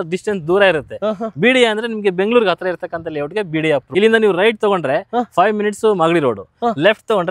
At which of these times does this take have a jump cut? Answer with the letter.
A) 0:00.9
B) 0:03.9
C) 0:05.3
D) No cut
B